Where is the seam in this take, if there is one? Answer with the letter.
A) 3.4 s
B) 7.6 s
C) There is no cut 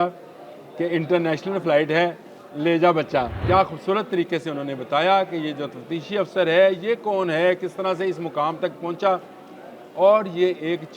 A